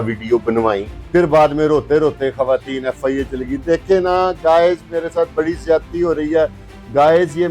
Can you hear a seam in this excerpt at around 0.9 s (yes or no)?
yes